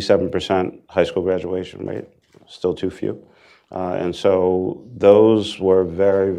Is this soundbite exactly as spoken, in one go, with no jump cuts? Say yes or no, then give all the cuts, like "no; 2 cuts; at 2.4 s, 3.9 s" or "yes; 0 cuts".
yes; 0 cuts